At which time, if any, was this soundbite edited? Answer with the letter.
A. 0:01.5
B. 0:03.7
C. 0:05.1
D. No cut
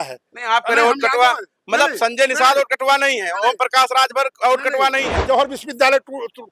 C